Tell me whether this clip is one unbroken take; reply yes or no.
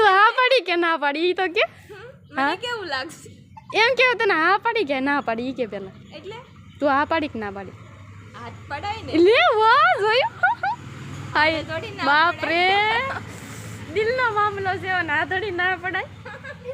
yes